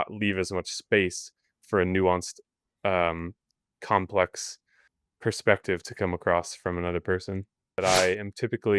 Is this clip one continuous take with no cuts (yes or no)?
no